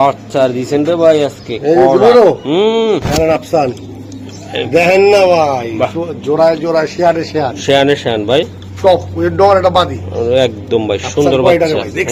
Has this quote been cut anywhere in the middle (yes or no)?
no